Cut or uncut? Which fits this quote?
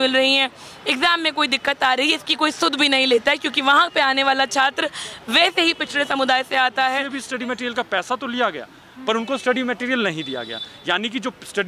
cut